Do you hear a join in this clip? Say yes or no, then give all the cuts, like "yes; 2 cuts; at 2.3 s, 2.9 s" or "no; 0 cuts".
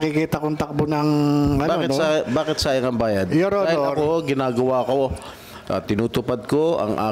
no; 0 cuts